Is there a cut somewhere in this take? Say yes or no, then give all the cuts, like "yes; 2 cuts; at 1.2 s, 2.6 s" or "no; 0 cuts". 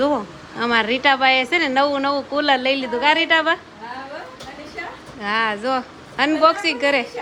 no; 0 cuts